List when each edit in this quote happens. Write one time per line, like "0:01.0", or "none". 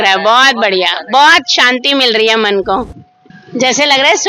none